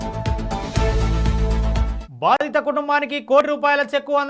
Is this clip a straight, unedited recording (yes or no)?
yes